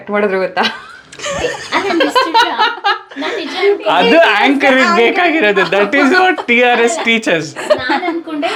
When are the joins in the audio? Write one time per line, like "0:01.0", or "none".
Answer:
none